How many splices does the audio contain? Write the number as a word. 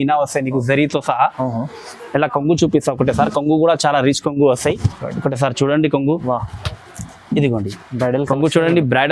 zero